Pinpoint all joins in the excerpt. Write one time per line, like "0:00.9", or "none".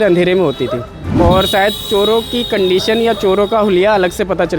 0:01.0